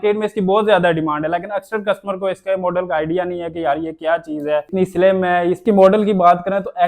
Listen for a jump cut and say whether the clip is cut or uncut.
cut